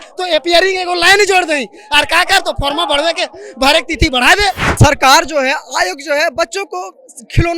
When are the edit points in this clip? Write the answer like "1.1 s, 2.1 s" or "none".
4.7 s